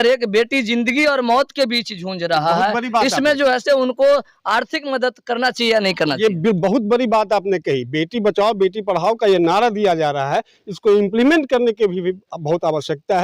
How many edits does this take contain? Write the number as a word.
zero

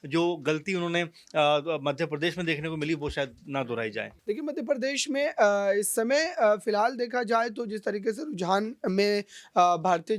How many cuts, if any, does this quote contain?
one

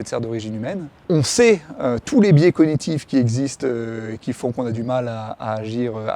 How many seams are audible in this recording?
one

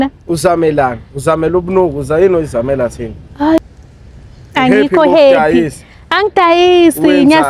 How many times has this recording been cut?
one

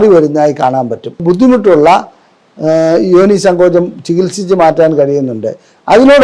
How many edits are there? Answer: one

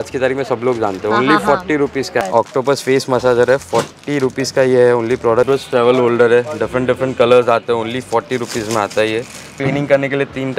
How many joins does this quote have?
three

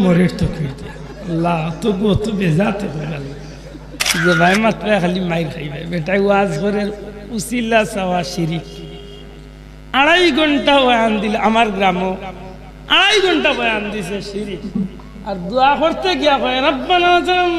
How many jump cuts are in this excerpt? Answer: one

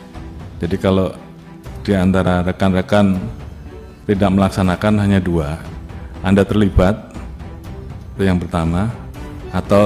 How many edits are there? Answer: zero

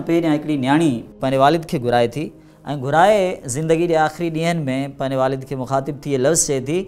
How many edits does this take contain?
one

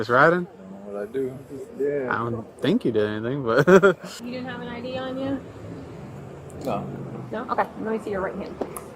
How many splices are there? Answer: one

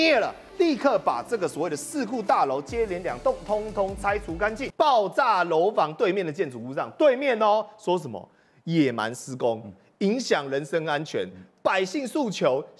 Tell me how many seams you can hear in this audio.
one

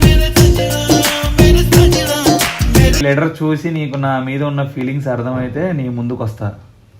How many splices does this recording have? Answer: one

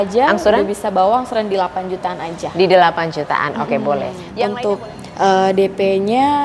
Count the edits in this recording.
one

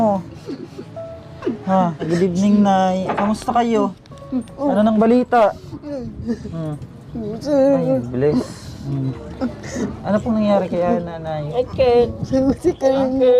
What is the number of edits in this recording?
two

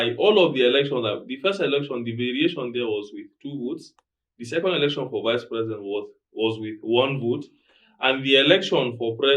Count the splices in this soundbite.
zero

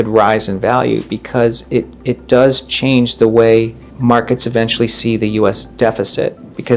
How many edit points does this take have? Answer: two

